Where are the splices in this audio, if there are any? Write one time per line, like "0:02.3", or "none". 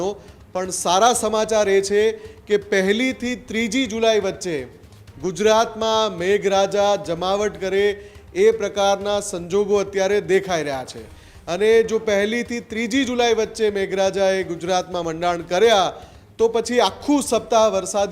none